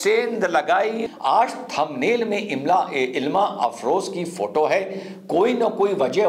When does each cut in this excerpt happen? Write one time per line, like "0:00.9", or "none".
0:01.1